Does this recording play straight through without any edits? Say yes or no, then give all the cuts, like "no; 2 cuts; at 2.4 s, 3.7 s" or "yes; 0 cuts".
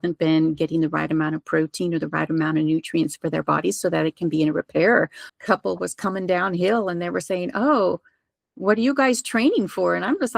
no; 1 cut; at 5.3 s